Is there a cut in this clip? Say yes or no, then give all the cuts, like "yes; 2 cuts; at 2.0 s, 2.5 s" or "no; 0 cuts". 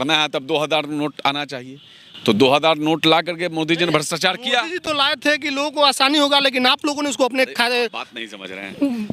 no; 0 cuts